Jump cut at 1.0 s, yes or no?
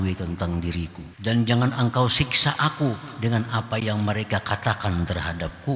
yes